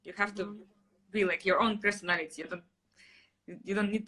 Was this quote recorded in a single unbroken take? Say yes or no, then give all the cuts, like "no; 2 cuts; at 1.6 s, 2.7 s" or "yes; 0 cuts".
yes; 0 cuts